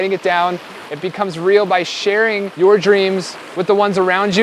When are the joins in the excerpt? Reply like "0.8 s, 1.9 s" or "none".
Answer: 2.4 s